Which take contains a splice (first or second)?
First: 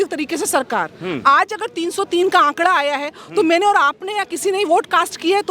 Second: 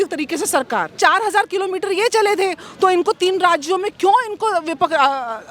second